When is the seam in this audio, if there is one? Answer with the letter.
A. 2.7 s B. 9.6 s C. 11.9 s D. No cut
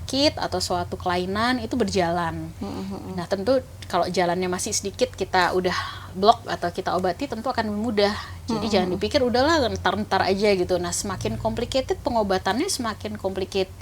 D